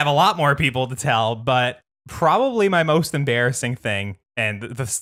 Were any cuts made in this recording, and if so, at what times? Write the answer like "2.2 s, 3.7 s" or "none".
none